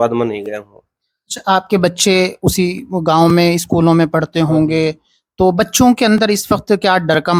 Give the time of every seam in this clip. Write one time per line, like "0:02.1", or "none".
none